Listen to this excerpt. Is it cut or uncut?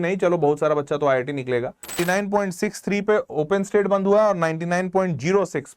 cut